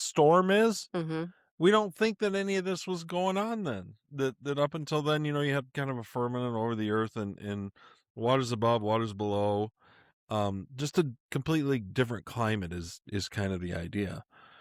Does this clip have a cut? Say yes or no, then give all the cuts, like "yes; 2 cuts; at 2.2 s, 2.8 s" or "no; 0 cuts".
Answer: no; 0 cuts